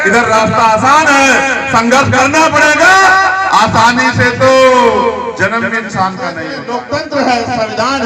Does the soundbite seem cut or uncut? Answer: cut